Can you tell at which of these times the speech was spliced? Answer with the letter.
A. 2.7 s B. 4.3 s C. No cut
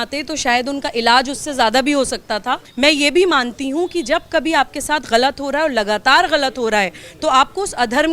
A